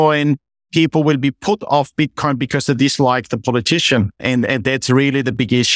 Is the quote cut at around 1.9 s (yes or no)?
no